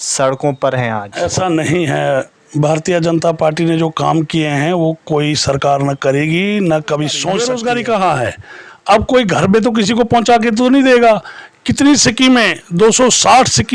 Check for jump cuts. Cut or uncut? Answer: cut